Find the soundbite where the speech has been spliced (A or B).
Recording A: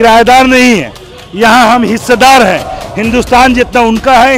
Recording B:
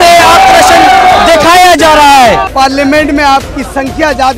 B